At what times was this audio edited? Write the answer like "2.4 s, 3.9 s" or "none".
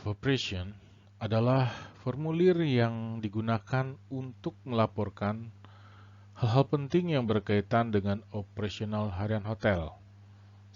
9.1 s